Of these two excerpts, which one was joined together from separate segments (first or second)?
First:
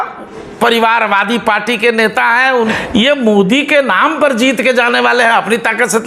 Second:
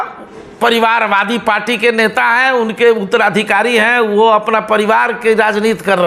first